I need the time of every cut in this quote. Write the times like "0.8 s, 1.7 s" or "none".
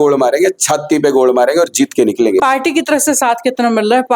2.4 s